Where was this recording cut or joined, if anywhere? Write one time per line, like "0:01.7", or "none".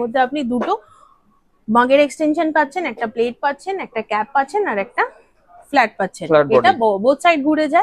none